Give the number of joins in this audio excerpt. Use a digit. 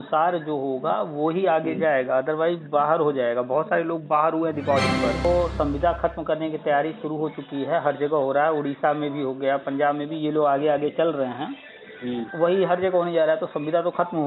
1